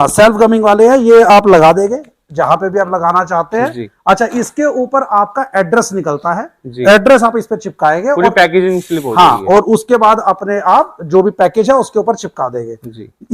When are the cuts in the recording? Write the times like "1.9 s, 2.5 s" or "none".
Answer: none